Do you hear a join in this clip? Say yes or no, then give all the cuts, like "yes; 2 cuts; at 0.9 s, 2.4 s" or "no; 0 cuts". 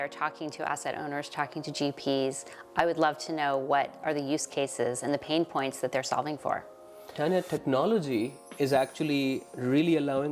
no; 0 cuts